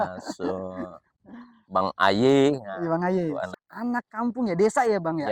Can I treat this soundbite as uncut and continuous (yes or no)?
no